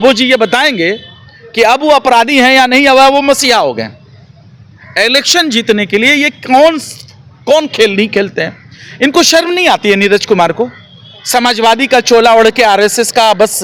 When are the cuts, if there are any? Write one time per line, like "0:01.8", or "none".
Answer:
none